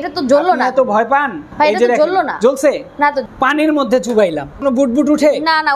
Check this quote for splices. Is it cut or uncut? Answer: cut